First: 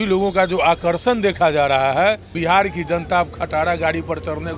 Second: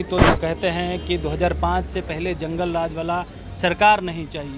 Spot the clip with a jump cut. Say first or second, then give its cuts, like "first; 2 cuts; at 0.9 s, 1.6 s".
first; 1 cut; at 2.3 s